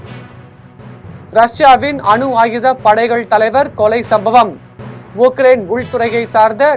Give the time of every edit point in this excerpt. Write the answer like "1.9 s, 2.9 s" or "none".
1.0 s